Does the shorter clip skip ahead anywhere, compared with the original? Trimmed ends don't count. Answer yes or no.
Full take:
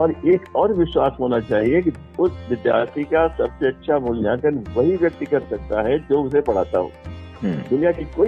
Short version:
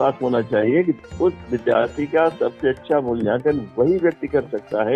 no